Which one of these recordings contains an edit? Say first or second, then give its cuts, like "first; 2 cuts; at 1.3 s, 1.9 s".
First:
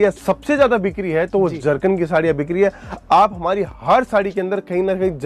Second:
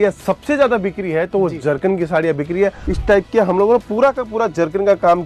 second; 1 cut; at 2.9 s